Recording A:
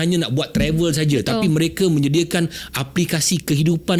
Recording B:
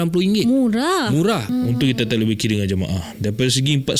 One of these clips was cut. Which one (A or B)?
B